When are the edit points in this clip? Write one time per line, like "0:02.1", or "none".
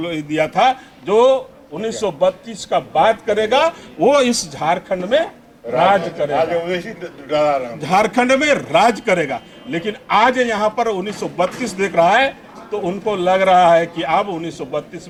none